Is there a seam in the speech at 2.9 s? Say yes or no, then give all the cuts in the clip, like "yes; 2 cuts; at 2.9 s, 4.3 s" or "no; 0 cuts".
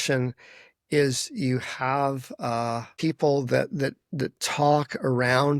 yes; 1 cut; at 2.9 s